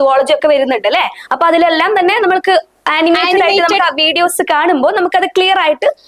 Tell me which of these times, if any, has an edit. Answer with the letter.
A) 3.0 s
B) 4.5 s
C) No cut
C